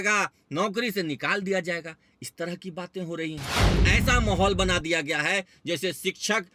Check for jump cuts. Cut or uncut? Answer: cut